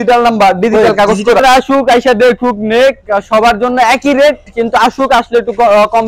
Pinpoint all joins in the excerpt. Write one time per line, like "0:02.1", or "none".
0:01.4